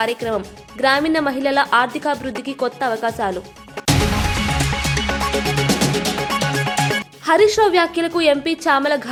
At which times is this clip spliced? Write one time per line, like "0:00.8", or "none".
none